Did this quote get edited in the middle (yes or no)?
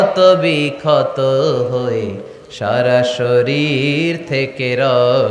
no